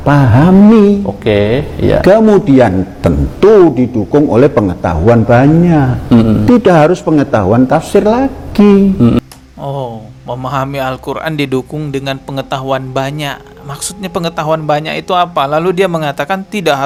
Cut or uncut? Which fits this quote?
uncut